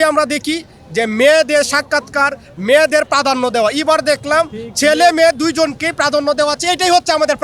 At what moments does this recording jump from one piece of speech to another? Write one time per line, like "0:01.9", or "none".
none